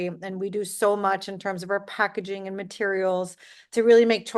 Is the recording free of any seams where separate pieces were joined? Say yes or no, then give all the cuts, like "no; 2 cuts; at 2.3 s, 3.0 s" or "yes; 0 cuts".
yes; 0 cuts